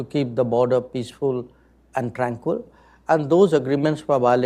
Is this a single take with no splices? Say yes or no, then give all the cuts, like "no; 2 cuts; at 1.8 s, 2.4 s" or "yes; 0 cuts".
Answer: yes; 0 cuts